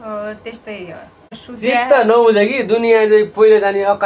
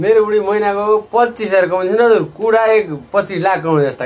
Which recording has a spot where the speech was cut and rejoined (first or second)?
first